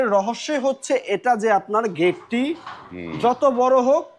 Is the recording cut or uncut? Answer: uncut